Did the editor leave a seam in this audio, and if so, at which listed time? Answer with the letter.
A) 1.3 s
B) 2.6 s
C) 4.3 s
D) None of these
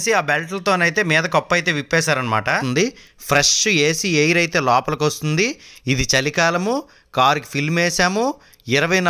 B